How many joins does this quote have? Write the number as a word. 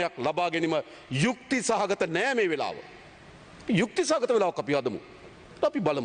zero